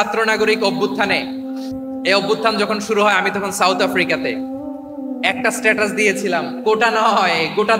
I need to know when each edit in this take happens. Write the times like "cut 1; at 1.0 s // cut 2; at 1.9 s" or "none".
cut 1; at 1.4 s

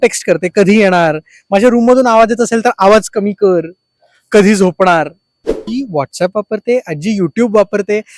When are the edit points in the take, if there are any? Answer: cut 1; at 5.7 s

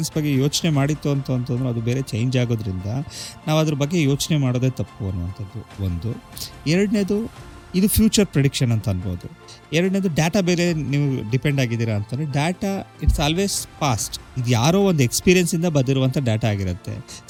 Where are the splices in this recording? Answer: none

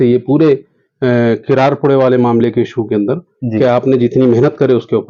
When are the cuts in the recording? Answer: none

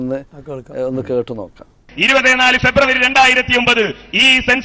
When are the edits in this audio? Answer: cut 1; at 1.8 s

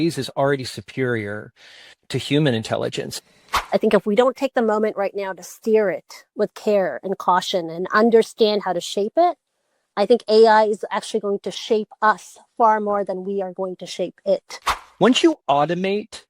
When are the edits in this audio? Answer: cut 1; at 3.3 s // cut 2; at 14.9 s

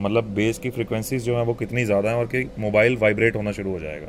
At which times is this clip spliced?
none

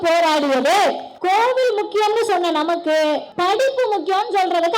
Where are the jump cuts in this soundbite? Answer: cut 1; at 1.1 s // cut 2; at 3.3 s

